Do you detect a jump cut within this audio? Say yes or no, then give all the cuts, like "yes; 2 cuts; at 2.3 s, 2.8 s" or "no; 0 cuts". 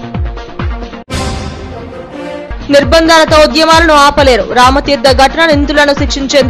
yes; 1 cut; at 0.9 s